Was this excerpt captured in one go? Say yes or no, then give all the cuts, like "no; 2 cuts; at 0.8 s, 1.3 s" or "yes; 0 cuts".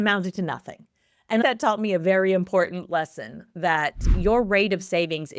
no; 2 cuts; at 1.4 s, 4.1 s